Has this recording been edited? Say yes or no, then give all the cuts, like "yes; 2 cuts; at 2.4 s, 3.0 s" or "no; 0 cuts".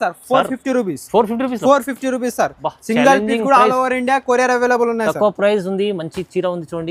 no; 0 cuts